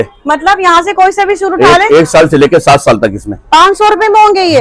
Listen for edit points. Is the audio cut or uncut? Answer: uncut